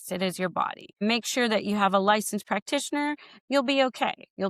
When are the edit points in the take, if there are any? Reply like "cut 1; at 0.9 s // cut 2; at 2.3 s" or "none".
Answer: cut 1; at 1.0 s